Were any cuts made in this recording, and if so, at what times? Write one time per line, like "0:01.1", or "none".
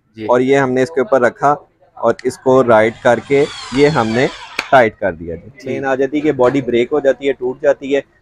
0:05.7